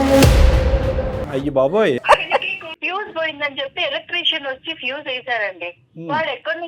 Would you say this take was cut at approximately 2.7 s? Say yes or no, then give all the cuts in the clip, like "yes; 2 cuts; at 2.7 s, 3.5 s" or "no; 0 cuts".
yes; 2 cuts; at 1.2 s, 2.7 s